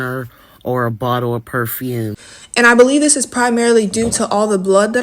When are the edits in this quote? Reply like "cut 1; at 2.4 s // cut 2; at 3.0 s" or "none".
cut 1; at 2.3 s